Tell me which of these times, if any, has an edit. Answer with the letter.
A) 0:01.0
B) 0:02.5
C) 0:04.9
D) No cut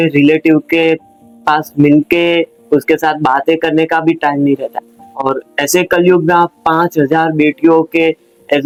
D